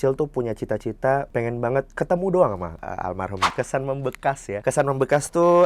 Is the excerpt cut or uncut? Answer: cut